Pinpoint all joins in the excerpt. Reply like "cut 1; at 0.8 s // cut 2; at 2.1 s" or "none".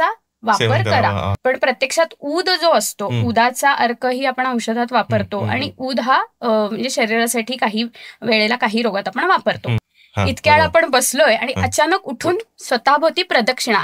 cut 1; at 1.3 s // cut 2; at 9.7 s